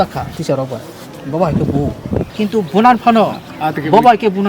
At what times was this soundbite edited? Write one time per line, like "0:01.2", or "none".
0:02.4

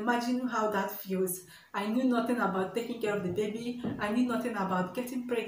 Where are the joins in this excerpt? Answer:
none

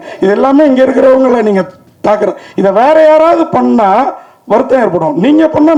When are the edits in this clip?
none

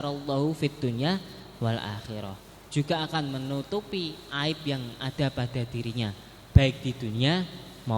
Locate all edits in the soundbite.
none

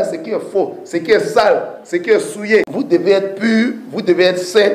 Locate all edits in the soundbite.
0:02.7

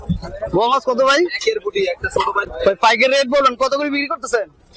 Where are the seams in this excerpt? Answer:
0:02.5

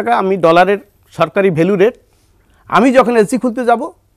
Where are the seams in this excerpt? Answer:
none

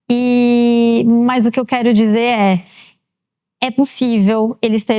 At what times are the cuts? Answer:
none

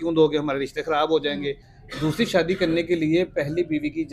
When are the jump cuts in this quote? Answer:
0:01.7

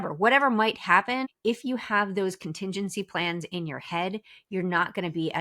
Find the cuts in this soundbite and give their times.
0:01.2

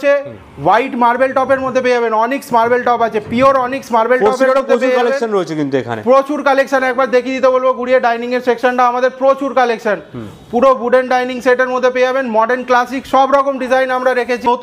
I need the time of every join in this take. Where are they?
none

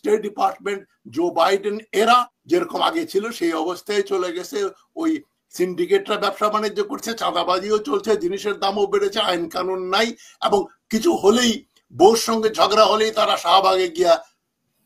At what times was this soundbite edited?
0:02.3

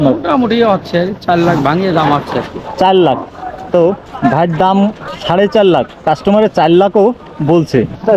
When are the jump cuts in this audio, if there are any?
none

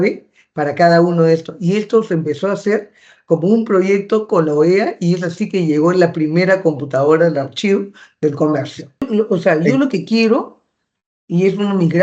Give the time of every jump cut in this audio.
0:09.1

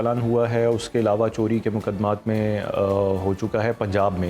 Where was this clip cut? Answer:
none

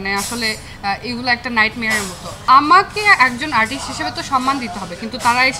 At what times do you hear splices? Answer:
0:02.3

